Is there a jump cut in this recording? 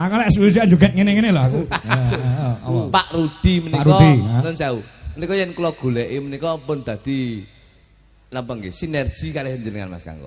no; 0 cuts

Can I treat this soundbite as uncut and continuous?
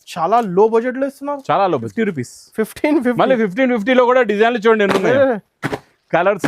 no; 1 cut; at 1.9 s

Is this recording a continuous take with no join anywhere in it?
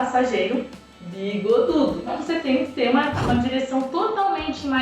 no; 1 cut; at 2.2 s

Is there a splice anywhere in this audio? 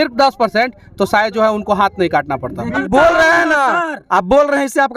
yes; 1 cut; at 2.8 s

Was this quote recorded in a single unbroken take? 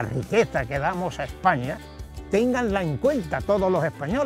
yes; 0 cuts

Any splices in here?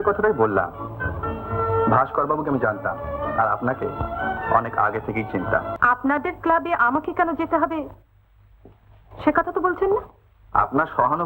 yes; 1 cut; at 5.7 s

